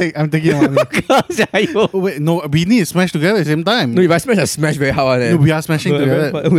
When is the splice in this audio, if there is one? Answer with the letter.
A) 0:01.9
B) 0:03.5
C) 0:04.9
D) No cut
A